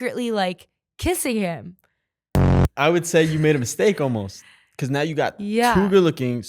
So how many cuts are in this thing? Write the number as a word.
one